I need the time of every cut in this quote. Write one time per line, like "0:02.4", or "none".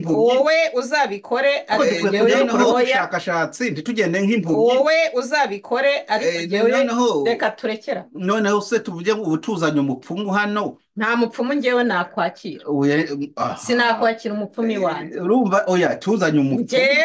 0:02.7